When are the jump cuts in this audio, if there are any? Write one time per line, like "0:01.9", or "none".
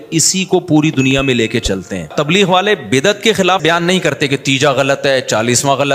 0:02.1
0:03.6